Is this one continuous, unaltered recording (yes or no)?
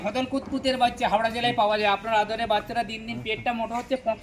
yes